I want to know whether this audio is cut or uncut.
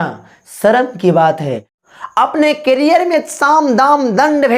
cut